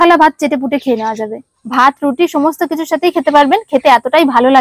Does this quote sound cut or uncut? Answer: cut